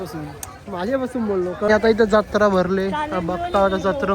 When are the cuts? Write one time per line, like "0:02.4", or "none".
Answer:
0:01.7